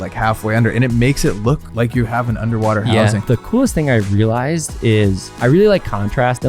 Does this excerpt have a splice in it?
yes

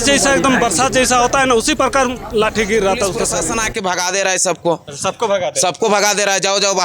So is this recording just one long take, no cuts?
no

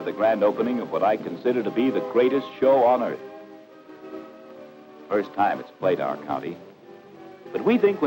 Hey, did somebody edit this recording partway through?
no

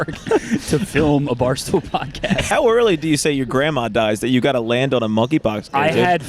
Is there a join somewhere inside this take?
yes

